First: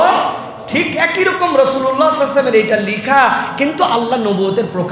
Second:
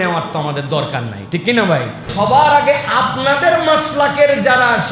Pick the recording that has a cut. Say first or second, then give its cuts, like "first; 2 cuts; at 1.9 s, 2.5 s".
second; 1 cut; at 2.1 s